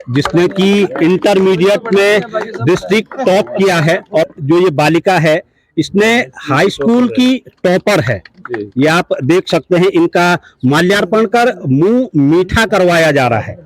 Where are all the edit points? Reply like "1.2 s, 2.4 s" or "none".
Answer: 4.3 s